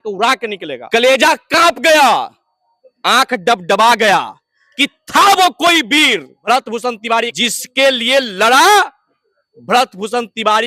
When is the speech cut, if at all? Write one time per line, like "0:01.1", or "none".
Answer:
0:00.8
0:06.4
0:07.3